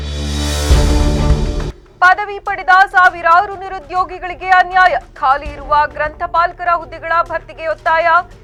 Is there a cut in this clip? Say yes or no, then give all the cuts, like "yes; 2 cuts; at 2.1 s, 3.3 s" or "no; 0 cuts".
no; 0 cuts